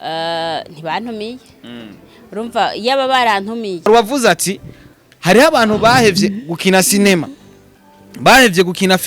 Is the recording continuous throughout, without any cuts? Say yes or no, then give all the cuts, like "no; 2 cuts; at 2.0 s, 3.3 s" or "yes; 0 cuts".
no; 1 cut; at 3.8 s